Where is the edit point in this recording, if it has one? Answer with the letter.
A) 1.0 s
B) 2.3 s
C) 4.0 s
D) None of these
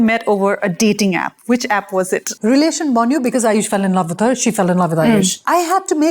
B